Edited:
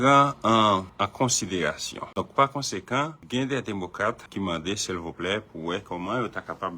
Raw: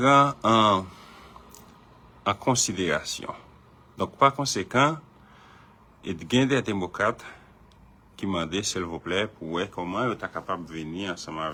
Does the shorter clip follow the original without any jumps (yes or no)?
no